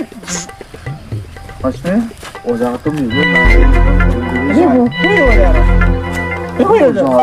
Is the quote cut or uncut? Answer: uncut